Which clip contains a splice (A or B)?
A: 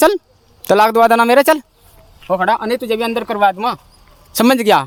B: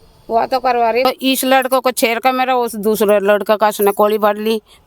B